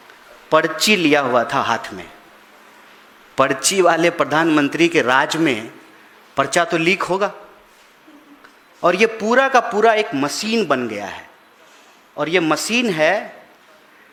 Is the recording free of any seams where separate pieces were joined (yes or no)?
yes